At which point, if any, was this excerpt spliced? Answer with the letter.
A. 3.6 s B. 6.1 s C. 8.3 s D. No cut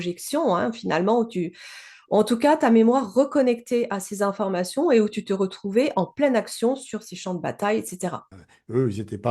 C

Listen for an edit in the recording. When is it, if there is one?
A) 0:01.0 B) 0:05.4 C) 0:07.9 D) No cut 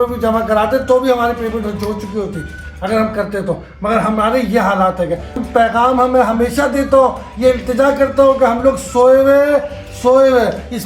B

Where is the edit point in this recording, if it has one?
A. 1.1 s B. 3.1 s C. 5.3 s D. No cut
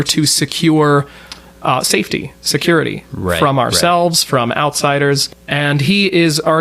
C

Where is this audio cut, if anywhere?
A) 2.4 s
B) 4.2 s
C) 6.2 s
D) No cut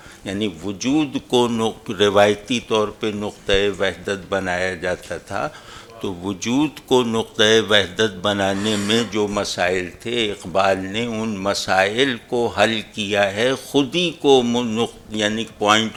D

